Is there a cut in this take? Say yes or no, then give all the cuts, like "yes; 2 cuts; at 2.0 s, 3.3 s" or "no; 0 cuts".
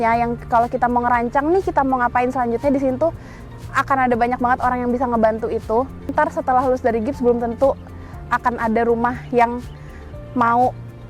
yes; 1 cut; at 6.1 s